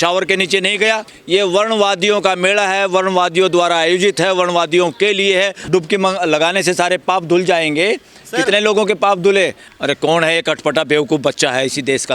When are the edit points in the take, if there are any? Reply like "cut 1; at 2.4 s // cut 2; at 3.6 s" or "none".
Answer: cut 1; at 1.1 s // cut 2; at 5.6 s // cut 3; at 9.7 s